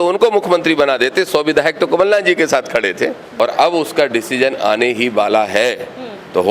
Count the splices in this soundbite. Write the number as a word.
one